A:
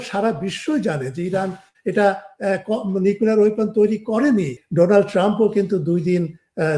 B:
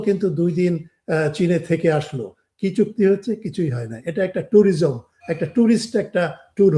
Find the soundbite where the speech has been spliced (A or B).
A